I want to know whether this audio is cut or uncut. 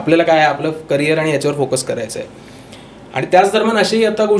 uncut